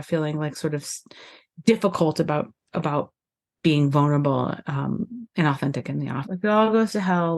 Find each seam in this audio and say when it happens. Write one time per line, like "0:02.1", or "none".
0:06.2